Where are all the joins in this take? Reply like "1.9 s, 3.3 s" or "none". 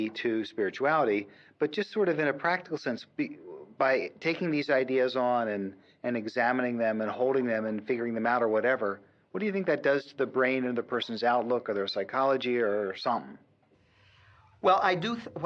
1.4 s